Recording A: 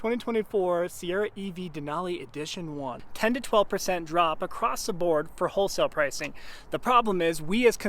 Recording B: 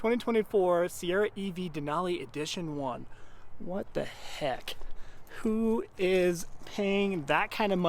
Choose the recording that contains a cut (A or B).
A